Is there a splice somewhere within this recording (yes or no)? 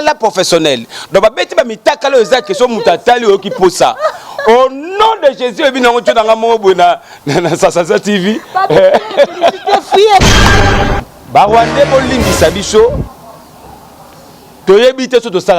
yes